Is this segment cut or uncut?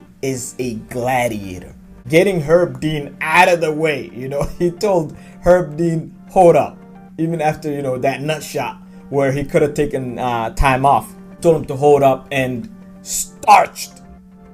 cut